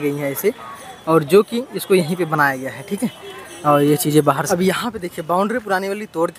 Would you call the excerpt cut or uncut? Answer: cut